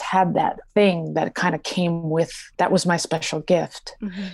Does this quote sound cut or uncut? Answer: cut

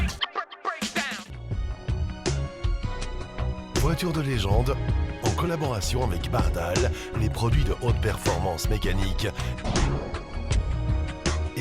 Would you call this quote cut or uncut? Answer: cut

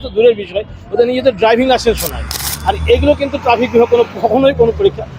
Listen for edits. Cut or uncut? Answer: uncut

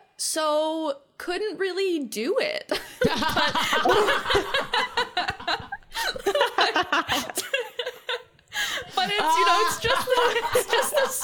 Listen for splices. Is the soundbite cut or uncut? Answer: uncut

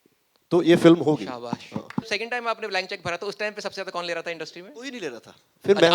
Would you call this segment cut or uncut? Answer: cut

